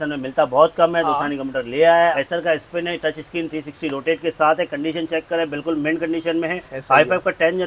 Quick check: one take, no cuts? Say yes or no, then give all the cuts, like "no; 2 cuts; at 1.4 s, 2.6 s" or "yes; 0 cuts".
yes; 0 cuts